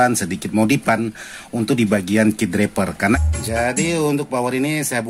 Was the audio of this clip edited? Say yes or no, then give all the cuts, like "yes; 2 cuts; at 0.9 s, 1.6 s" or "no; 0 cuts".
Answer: yes; 1 cut; at 2.9 s